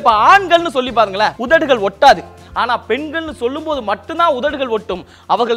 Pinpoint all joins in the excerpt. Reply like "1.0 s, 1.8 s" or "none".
1.4 s, 2.3 s